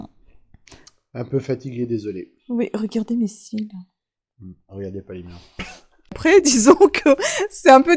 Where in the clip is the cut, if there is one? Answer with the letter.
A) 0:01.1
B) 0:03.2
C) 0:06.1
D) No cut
C